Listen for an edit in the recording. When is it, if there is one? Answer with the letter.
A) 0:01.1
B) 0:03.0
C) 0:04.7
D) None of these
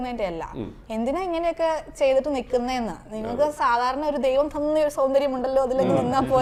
D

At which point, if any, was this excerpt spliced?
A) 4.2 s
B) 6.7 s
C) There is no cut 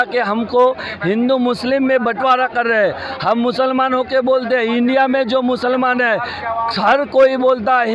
C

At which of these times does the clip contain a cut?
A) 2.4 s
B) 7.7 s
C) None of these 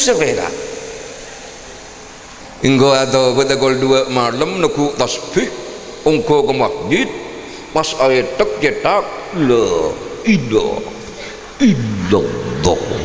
A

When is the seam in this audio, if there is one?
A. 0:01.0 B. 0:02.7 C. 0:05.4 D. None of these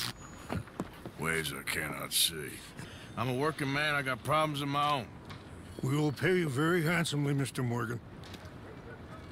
B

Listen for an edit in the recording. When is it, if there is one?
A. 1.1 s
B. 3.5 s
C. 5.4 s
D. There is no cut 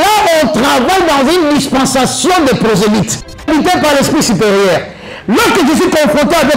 B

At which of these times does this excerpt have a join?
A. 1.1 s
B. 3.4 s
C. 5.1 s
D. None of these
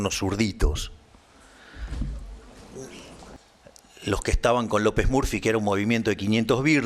B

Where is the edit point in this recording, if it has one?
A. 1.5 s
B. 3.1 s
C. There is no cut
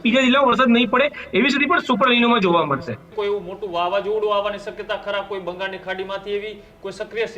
B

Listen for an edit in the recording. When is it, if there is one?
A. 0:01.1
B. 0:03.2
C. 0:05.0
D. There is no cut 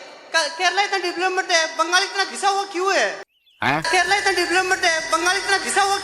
B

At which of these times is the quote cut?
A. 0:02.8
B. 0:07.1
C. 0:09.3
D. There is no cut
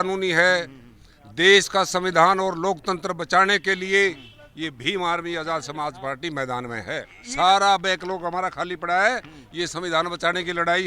B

